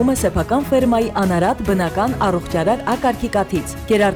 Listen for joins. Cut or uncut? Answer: uncut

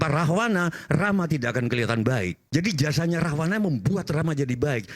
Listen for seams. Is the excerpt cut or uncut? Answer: cut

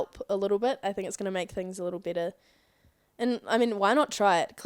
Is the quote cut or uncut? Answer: uncut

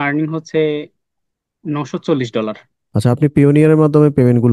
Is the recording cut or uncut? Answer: cut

